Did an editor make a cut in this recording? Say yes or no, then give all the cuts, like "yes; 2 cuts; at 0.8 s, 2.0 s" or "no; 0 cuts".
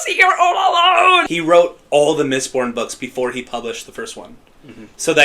yes; 1 cut; at 1.3 s